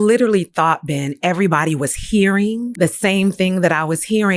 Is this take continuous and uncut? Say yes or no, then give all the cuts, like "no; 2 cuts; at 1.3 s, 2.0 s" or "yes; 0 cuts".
no; 1 cut; at 2.8 s